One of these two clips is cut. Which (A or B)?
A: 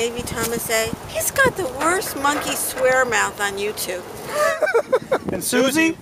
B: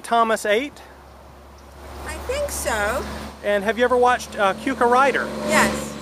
A